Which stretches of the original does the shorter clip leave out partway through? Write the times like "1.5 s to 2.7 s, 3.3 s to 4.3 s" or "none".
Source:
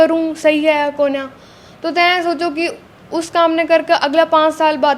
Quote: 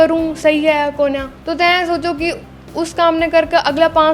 1.3 s to 1.7 s

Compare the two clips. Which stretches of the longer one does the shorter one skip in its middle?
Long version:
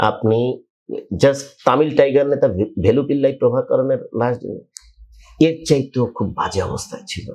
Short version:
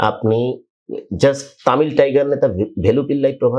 none

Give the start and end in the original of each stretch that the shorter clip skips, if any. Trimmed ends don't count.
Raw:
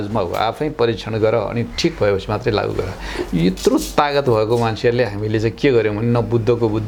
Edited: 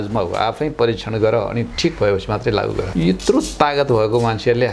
2.9 s to 3.3 s

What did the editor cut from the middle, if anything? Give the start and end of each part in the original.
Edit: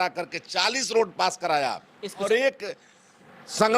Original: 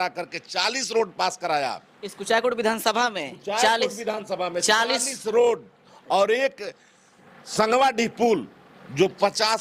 2.2 s to 6.2 s

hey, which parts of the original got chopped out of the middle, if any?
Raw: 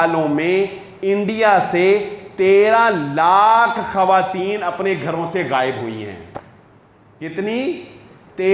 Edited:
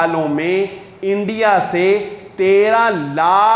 none

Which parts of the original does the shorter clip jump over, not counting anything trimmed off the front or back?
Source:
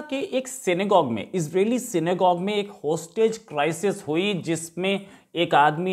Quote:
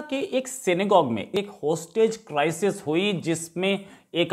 1.3 s to 2.5 s

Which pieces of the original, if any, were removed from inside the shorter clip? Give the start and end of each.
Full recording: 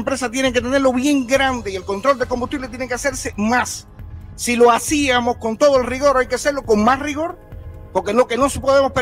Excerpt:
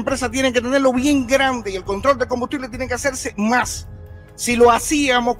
none

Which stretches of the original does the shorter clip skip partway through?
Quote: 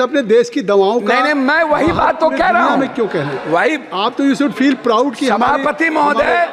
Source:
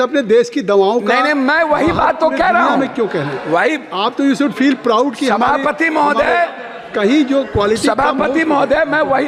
none

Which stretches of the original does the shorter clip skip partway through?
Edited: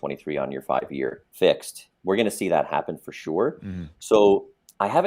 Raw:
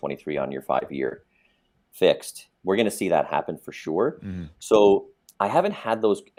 1.2 s to 1.8 s

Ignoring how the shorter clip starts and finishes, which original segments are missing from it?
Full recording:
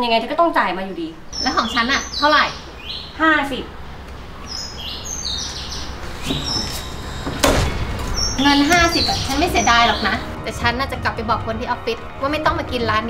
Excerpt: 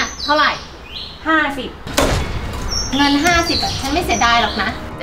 3.8 s to 7.4 s

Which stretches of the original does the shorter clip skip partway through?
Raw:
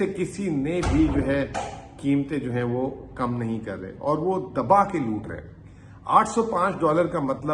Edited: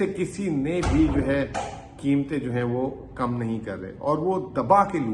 none

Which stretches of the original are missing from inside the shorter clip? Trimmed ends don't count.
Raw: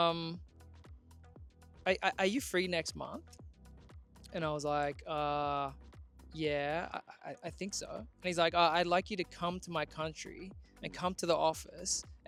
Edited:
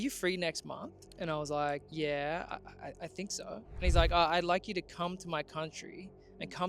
3.3 s to 4.1 s, 5.0 s to 6.3 s

